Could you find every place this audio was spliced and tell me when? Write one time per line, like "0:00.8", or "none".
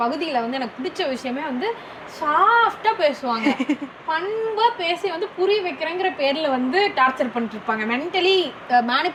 none